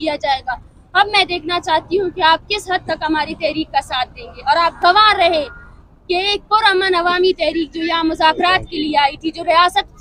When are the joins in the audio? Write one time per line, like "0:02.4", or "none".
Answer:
none